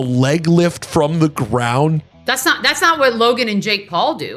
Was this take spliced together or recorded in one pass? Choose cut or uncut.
cut